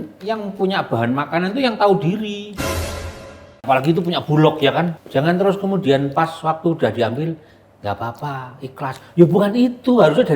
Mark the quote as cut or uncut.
cut